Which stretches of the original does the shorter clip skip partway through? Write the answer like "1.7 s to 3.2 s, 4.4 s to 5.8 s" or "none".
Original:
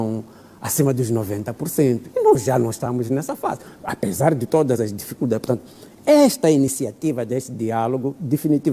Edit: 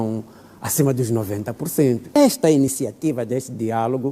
2.2 s to 6.2 s